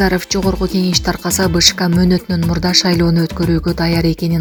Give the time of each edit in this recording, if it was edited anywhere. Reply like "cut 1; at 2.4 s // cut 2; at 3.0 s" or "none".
none